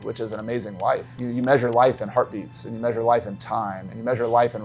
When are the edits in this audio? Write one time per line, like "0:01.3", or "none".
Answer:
0:01.1